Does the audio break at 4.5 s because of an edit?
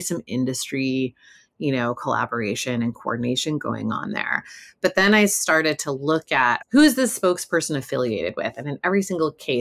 no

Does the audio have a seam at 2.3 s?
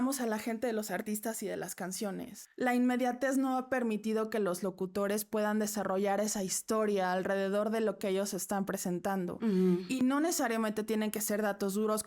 yes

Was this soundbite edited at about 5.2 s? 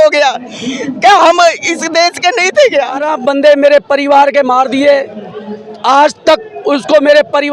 no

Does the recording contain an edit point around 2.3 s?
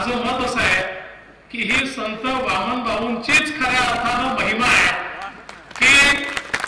no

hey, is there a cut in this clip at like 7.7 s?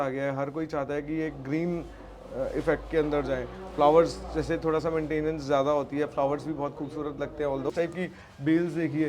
yes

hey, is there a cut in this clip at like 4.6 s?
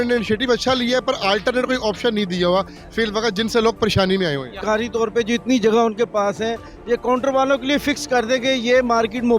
yes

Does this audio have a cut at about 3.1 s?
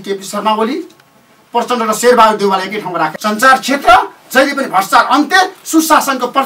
yes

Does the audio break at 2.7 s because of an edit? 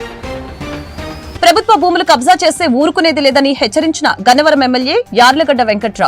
no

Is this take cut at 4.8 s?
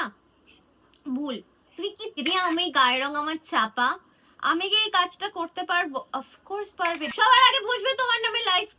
no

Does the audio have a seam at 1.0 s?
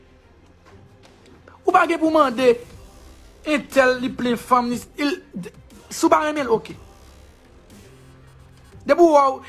yes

